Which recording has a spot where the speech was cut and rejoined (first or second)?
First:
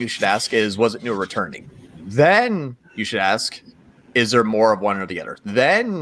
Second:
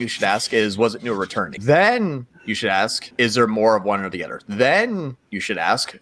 second